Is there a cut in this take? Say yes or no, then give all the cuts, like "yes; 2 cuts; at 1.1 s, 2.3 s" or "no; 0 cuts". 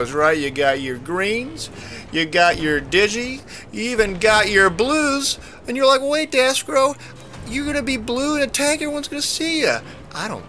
yes; 1 cut; at 4.3 s